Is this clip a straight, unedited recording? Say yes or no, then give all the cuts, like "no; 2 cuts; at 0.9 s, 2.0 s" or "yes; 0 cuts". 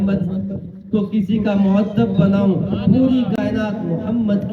yes; 0 cuts